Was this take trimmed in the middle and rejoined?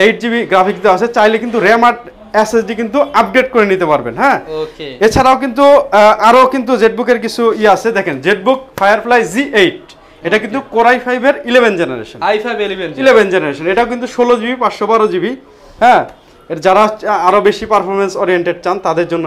no; 0 cuts

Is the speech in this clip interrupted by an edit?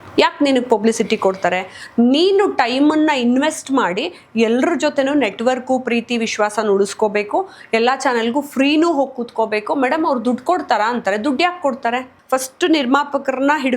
yes; 1 cut; at 12.1 s

